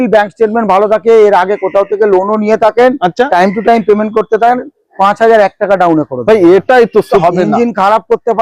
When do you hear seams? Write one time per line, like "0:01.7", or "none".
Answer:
0:07.1